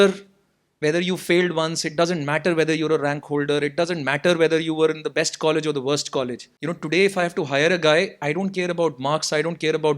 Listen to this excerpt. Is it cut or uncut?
cut